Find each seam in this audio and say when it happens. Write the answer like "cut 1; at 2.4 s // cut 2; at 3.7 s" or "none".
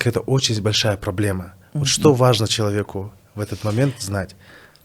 none